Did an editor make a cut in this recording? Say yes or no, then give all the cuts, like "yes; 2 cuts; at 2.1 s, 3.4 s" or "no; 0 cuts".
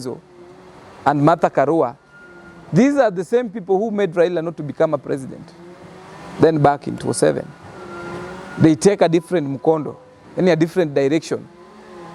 no; 0 cuts